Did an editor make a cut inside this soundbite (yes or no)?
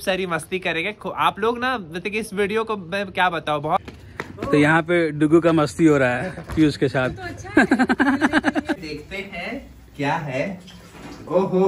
yes